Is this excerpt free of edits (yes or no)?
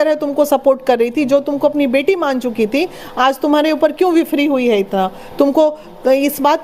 yes